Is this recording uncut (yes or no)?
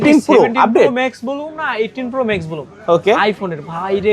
yes